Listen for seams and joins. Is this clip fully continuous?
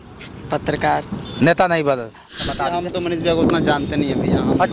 no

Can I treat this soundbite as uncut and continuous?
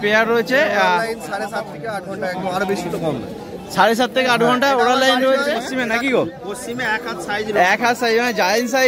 no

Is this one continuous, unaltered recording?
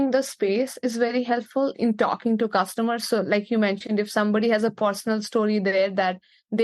no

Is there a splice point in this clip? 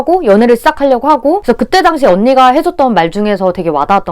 yes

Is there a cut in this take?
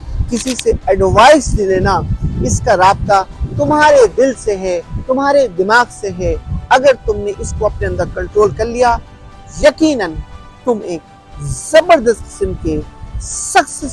no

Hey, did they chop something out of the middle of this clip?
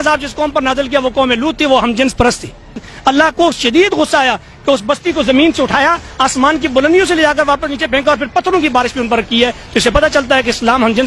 yes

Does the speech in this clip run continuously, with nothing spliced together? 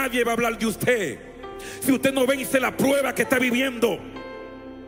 yes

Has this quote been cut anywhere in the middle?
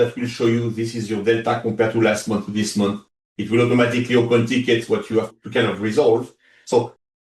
yes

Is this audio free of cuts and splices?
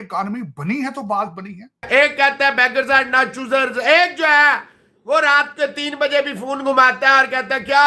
no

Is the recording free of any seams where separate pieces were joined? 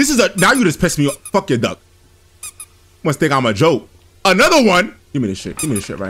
no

